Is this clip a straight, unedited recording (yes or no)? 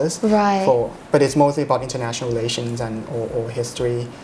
no